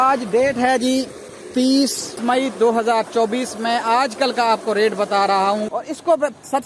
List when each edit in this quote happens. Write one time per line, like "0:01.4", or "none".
0:02.2
0:05.7